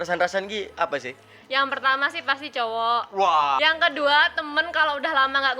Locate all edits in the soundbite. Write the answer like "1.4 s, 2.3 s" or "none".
3.6 s